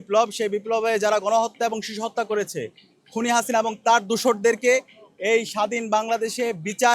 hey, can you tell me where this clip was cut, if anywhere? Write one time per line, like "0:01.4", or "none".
none